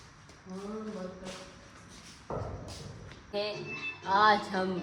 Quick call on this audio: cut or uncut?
cut